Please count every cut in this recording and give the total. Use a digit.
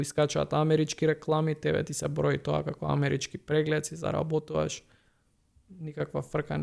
0